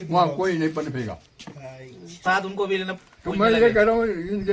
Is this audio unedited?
no; 1 cut; at 2.2 s

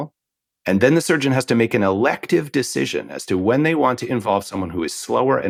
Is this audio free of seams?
yes; 0 cuts

